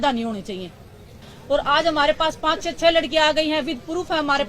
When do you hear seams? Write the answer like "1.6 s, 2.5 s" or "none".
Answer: 1.1 s